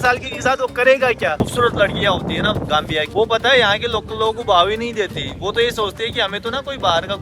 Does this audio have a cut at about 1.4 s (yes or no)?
yes